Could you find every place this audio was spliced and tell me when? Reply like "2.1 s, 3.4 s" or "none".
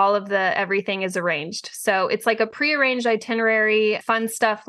none